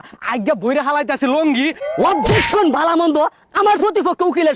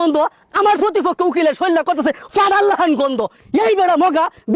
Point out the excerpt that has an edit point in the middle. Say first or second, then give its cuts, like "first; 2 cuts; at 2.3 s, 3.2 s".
first; 1 cut; at 1.8 s